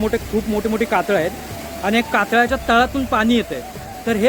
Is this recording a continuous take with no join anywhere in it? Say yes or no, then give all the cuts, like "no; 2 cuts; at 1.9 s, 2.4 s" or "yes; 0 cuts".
yes; 0 cuts